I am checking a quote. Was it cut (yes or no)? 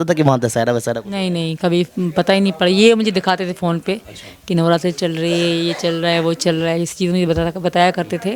no